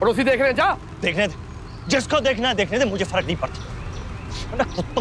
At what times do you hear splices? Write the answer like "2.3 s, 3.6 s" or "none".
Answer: none